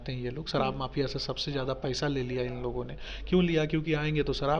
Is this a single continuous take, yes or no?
yes